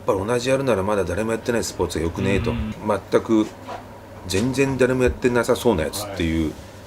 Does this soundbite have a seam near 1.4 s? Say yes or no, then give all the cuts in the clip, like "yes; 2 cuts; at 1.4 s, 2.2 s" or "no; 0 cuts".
no; 1 cut; at 2.7 s